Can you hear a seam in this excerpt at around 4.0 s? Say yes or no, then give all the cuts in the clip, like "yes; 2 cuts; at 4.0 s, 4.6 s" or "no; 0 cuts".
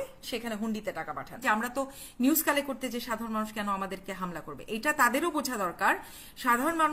no; 1 cut; at 1.4 s